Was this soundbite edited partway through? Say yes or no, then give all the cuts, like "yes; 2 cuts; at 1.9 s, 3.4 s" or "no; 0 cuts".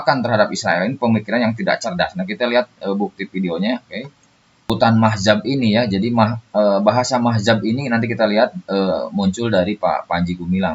yes; 1 cut; at 4.7 s